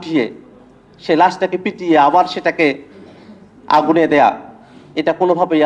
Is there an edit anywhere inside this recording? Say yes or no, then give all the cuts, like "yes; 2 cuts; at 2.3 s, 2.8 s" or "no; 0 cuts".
no; 0 cuts